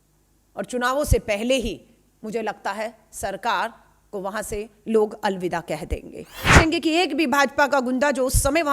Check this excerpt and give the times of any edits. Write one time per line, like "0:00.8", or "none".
0:06.5